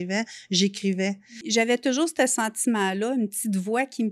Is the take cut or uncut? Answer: cut